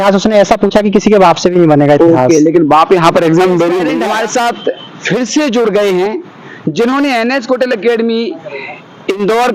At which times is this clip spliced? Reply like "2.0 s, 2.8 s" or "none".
3.9 s